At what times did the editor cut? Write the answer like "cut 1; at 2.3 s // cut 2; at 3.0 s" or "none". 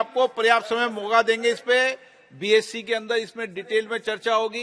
none